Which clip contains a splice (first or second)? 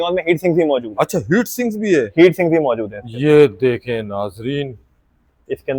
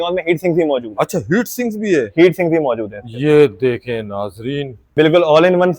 second